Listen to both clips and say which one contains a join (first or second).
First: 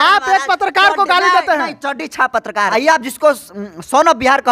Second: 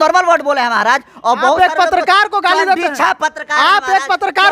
first